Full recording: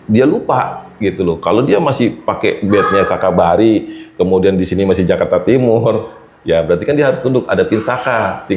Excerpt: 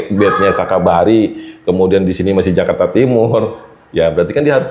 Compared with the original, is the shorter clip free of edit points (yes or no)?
yes